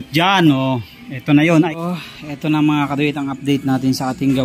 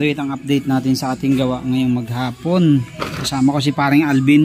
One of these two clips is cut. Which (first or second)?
first